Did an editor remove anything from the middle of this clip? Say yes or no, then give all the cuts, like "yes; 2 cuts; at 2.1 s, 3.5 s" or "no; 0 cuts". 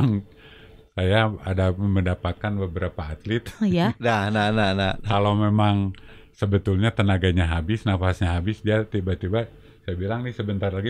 no; 0 cuts